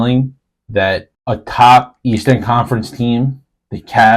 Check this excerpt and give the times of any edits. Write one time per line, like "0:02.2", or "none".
0:01.1